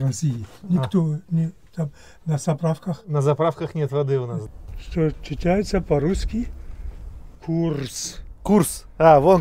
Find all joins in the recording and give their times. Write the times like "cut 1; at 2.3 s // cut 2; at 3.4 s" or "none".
cut 1; at 4.4 s